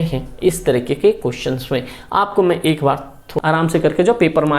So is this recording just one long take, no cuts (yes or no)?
no